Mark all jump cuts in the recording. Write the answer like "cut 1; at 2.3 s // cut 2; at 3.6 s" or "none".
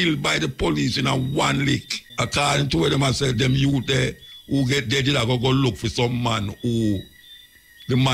cut 1; at 2.0 s

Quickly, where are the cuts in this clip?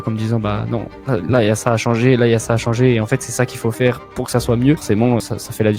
none

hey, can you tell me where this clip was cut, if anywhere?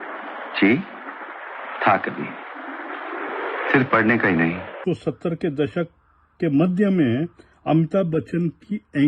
cut 1; at 4.8 s

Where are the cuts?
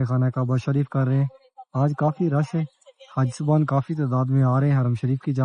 none

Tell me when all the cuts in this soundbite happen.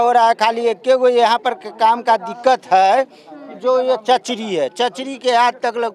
none

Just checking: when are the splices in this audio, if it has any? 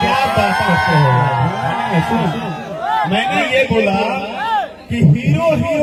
none

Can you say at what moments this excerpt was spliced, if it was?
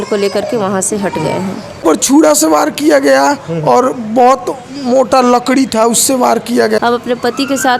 cut 1; at 1.8 s // cut 2; at 6.8 s

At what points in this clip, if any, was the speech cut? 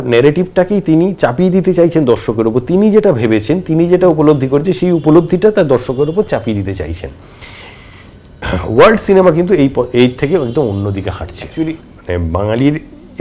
cut 1; at 11.4 s

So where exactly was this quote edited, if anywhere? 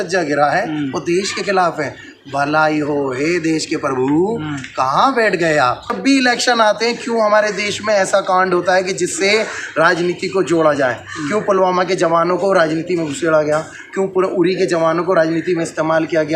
cut 1; at 6.0 s

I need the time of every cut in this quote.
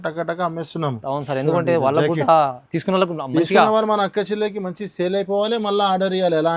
none

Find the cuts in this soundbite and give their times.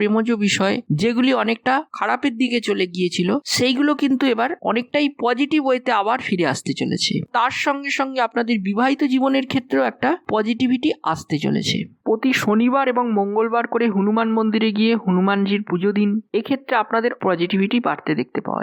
cut 1; at 7.3 s // cut 2; at 11.9 s

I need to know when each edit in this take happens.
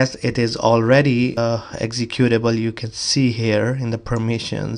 cut 1; at 1.4 s

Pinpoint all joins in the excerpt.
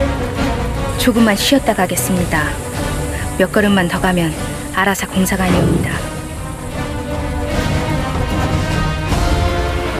none

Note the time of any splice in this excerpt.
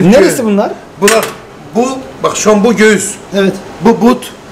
none

